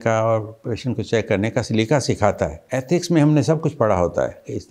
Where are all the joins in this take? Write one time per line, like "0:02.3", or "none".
0:02.6